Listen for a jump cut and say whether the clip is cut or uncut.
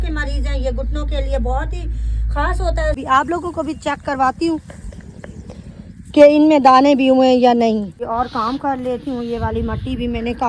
cut